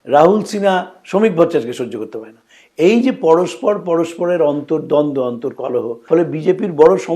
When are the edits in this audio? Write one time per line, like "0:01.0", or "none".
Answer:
0:06.0